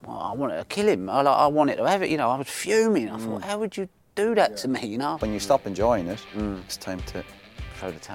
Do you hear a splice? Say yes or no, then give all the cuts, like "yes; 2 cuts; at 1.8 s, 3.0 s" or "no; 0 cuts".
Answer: yes; 2 cuts; at 5.2 s, 6.7 s